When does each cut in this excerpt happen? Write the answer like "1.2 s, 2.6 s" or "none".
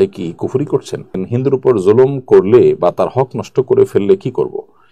1.0 s